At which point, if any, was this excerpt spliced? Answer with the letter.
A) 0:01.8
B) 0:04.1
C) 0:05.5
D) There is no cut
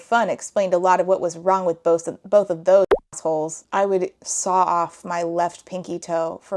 D